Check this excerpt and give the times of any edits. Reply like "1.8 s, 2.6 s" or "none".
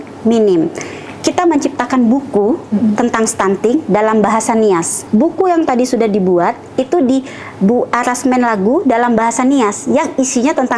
5.0 s